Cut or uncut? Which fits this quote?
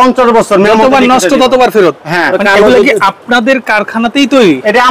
cut